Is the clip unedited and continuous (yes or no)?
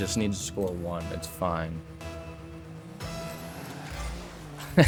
yes